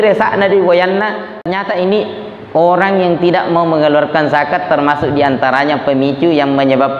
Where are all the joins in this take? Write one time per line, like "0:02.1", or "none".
0:01.5

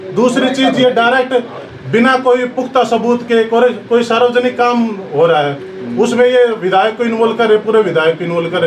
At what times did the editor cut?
none

